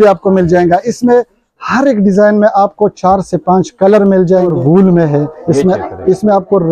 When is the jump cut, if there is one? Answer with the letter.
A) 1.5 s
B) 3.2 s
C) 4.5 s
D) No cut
C